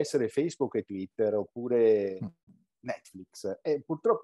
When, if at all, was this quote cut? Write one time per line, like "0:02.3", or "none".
none